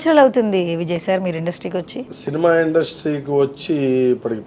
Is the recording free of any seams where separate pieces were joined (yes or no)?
no